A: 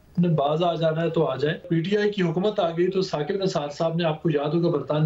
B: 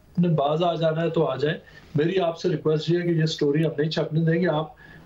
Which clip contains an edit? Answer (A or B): A